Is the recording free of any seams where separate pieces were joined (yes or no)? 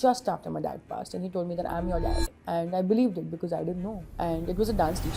no